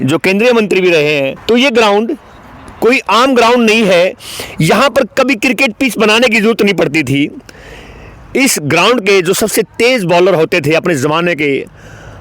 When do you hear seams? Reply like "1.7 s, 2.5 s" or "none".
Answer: 1.3 s